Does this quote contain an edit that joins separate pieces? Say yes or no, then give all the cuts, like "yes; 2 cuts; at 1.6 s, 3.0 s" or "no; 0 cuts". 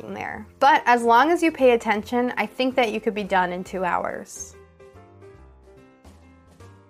yes; 1 cut; at 4.3 s